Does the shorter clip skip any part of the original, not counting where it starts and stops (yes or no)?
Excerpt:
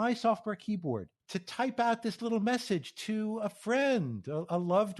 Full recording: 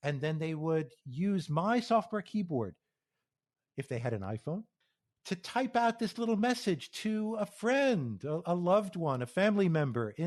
yes